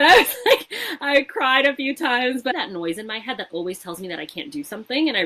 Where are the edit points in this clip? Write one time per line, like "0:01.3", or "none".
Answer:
0:02.5